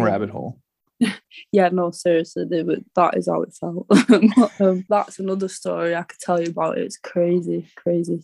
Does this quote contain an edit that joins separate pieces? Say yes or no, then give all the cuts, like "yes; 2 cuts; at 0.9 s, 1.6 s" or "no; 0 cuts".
yes; 1 cut; at 4.8 s